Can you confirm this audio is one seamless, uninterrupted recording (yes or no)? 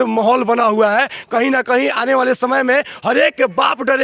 yes